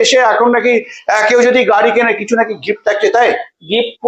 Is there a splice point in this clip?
no; 0 cuts

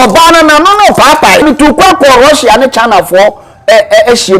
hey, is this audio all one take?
no; 1 cut; at 1.4 s

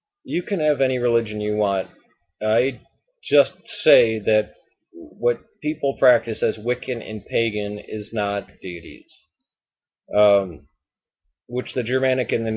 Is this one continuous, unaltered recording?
yes; 0 cuts

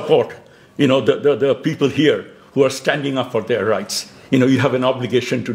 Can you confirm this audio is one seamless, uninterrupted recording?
yes; 0 cuts

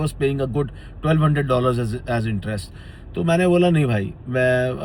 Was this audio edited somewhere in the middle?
no; 0 cuts

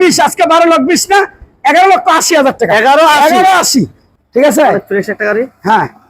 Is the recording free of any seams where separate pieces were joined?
no; 1 cut; at 4.0 s

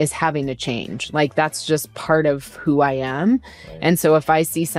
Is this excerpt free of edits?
yes; 0 cuts

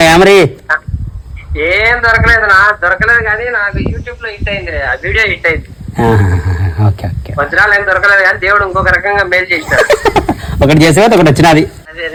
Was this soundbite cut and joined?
no; 0 cuts

